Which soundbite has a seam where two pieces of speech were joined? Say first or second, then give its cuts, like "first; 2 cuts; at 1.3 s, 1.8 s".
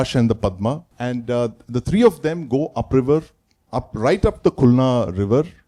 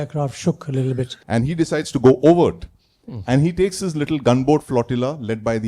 second; 1 cut; at 1.1 s